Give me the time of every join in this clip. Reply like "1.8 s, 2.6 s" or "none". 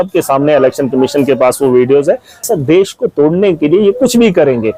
2.4 s